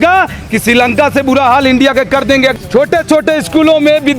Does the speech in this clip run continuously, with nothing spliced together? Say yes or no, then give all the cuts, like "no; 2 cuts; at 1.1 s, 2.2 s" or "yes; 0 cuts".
no; 1 cut; at 2.5 s